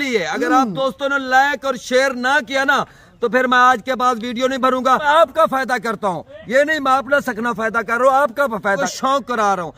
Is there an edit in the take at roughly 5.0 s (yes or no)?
yes